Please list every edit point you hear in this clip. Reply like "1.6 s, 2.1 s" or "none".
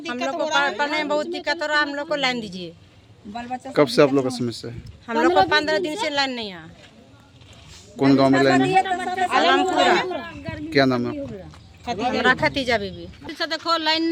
none